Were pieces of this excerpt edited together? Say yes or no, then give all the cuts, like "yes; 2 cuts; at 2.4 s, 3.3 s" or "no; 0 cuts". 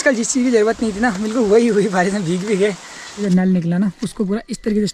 yes; 1 cut; at 3.2 s